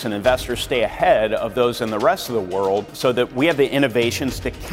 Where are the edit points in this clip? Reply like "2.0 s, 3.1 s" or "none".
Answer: 3.0 s